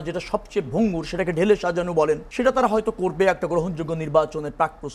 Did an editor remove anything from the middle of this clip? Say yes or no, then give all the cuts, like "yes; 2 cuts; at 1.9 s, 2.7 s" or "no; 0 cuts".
yes; 1 cut; at 2.3 s